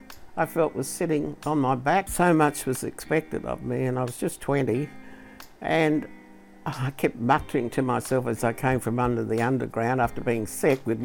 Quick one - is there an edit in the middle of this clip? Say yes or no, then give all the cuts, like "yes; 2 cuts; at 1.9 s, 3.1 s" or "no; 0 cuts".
yes; 1 cut; at 2.1 s